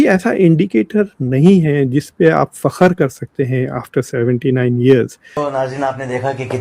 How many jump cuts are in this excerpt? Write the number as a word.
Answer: one